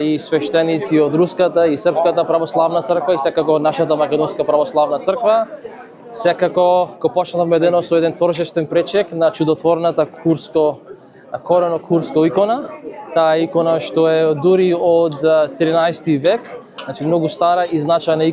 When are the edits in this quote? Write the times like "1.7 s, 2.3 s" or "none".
none